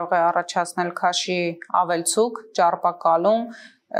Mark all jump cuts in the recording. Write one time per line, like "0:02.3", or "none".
none